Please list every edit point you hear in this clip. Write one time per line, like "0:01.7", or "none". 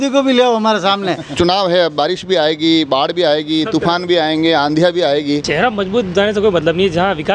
0:01.3
0:05.5